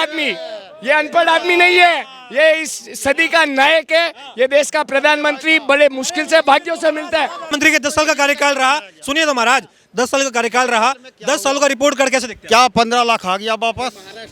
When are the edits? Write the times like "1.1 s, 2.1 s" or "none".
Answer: 7.5 s